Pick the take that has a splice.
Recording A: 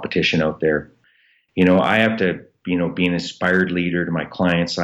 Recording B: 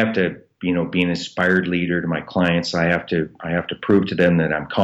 A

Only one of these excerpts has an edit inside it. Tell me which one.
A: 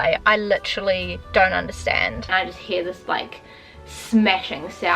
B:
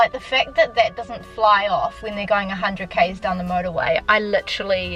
A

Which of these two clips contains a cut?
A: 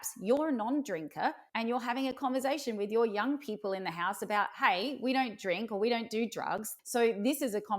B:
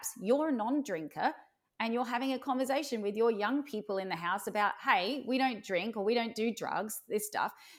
A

